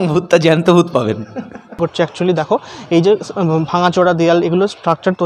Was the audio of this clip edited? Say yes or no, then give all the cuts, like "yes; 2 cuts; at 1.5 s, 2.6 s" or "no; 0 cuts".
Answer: yes; 1 cut; at 1.8 s